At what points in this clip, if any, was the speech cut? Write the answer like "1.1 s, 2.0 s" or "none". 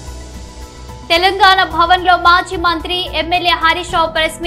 0.9 s